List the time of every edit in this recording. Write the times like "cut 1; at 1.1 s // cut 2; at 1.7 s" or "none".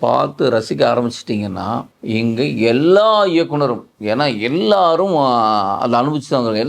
cut 1; at 1.9 s // cut 2; at 3.9 s